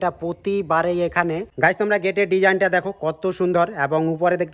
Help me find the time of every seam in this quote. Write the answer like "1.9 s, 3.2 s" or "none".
1.5 s